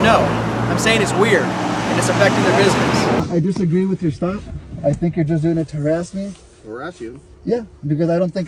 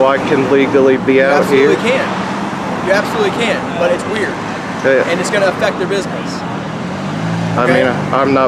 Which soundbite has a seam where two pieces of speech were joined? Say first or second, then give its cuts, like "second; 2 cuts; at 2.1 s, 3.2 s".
first; 1 cut; at 3.2 s